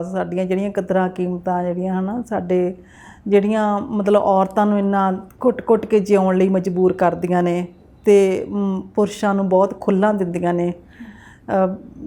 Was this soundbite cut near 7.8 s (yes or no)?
no